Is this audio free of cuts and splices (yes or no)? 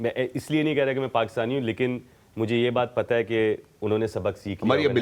yes